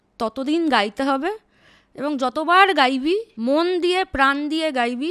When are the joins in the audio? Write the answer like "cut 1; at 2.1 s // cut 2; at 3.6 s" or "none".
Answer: cut 1; at 3.3 s